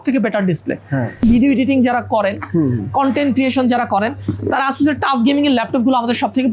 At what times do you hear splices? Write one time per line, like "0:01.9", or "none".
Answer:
0:01.2

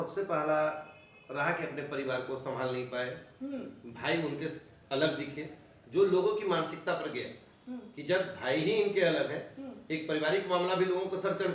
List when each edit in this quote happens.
none

